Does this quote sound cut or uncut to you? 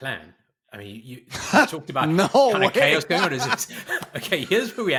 uncut